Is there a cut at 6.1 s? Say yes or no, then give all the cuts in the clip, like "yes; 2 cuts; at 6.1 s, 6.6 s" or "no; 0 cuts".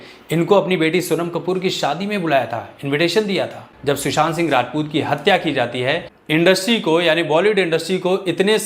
yes; 2 cuts; at 3.7 s, 6.1 s